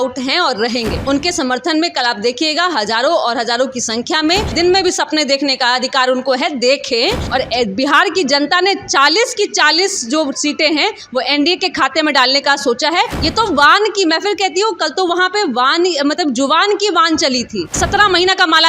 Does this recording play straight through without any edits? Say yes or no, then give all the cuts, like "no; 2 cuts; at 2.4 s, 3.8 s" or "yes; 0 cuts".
no; 5 cuts; at 1.0 s, 4.5 s, 7.2 s, 13.2 s, 17.7 s